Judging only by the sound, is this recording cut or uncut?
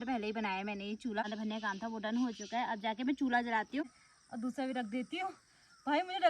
cut